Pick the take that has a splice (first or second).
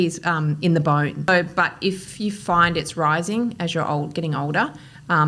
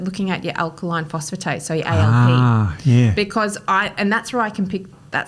first